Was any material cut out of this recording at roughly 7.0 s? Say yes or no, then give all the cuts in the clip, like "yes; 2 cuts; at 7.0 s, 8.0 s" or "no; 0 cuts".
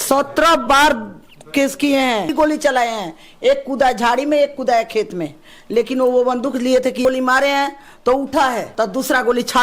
yes; 3 cuts; at 2.3 s, 7.0 s, 8.7 s